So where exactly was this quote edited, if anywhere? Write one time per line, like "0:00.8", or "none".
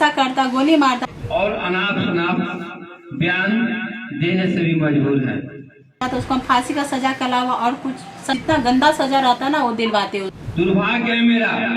0:01.1
0:06.0
0:08.4
0:10.4